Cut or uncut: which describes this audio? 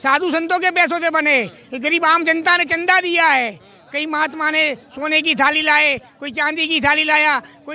uncut